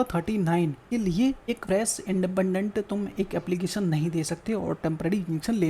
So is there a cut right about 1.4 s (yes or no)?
yes